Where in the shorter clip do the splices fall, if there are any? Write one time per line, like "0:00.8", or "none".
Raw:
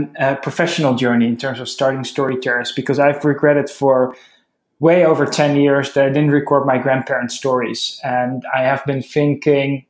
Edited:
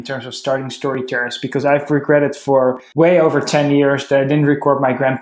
0:02.8